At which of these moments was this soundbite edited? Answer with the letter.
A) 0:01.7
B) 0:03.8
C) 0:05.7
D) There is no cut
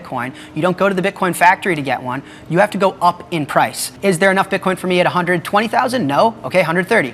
B